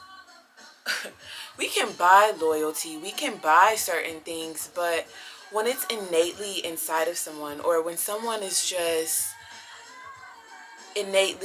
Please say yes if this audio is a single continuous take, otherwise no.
yes